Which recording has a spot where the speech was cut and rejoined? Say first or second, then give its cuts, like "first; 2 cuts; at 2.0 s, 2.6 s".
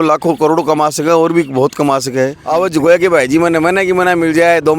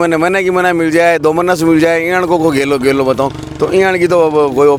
first; 1 cut; at 2.4 s